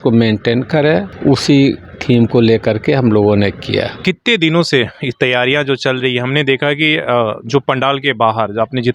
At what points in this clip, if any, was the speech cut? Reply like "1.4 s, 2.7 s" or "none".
1.1 s, 3.9 s